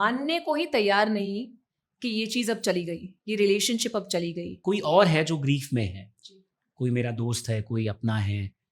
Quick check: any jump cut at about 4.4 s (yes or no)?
yes